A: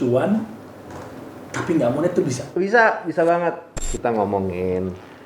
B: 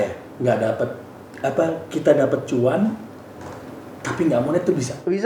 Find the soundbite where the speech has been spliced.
A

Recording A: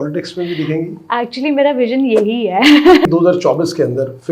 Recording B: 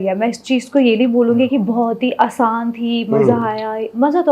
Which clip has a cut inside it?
A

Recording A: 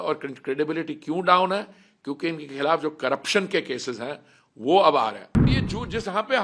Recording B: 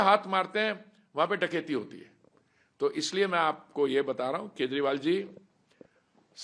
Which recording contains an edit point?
A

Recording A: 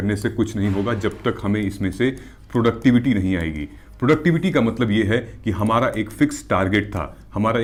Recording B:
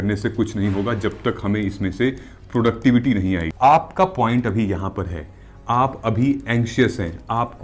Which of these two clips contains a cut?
B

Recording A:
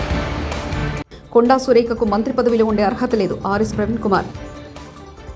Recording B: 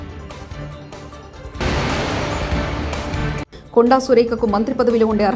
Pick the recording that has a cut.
A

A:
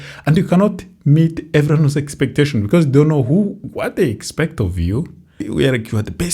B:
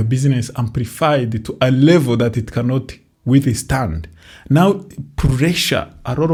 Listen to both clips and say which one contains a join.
A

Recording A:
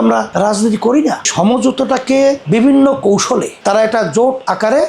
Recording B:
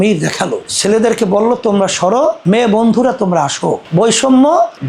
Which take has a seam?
A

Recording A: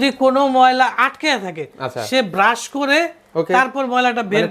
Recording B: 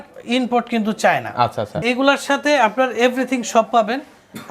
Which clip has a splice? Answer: B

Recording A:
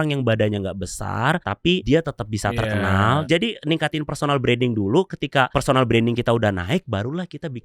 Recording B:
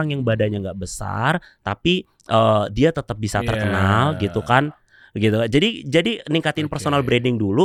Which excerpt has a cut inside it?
A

